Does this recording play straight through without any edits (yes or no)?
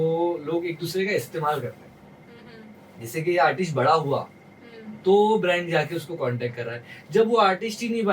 yes